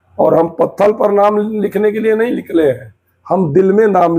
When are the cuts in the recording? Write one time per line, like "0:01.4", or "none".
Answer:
none